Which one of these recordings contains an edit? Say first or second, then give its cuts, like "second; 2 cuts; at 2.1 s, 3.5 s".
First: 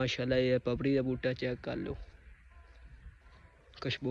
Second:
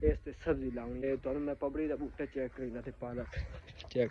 second; 1 cut; at 1.0 s